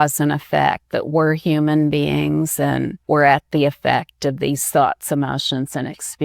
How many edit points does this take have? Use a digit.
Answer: 1